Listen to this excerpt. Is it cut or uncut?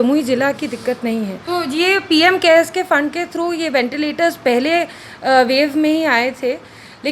cut